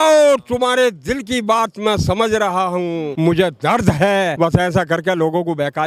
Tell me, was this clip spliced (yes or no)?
yes